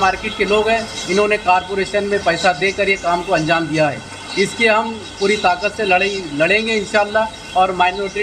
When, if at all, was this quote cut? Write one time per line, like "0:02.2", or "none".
none